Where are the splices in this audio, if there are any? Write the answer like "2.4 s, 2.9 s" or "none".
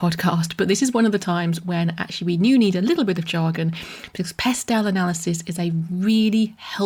none